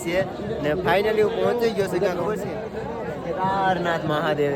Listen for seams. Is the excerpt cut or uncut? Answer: uncut